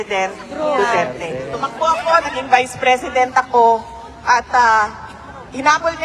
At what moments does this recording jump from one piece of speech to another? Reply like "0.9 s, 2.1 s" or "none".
1.6 s